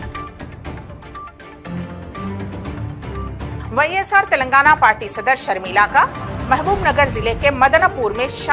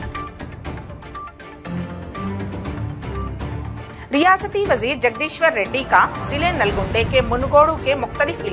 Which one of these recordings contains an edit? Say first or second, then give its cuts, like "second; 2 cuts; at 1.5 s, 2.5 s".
second; 1 cut; at 3.6 s